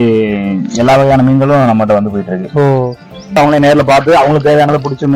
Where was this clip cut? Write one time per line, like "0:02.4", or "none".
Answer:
0:03.4